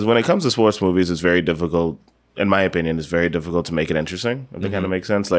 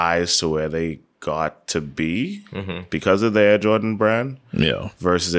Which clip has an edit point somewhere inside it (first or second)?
second